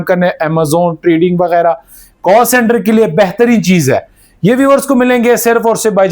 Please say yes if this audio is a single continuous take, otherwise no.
yes